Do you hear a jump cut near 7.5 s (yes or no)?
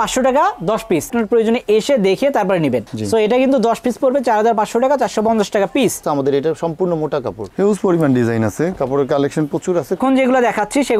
no